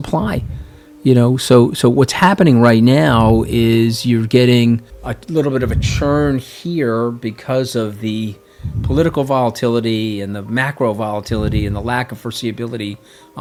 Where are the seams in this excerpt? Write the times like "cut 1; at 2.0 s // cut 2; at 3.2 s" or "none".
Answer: none